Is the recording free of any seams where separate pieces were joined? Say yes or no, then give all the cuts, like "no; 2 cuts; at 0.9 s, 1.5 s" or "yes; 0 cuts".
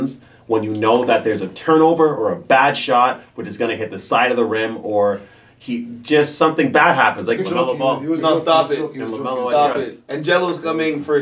no; 1 cut; at 7.4 s